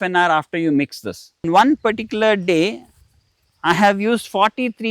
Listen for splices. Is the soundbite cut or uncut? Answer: cut